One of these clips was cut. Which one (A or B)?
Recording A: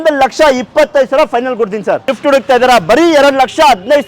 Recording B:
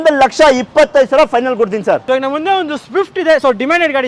A